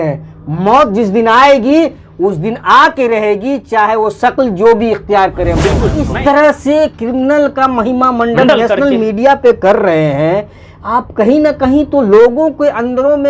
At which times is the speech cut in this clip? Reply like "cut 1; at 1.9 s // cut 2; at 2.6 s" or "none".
cut 1; at 6.0 s